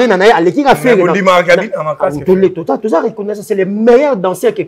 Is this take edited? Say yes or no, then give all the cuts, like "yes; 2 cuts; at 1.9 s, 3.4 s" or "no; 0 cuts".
no; 0 cuts